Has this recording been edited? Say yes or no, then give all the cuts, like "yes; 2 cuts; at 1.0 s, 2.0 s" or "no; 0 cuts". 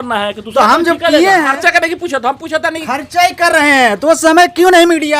yes; 1 cut; at 1.5 s